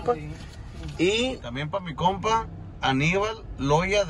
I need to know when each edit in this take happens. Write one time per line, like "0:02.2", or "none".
0:01.5